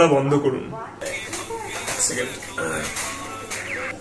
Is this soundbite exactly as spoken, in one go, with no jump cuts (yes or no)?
yes